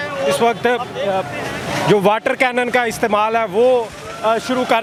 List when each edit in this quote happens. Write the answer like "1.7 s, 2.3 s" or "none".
none